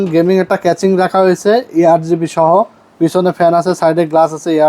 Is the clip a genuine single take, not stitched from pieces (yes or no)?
yes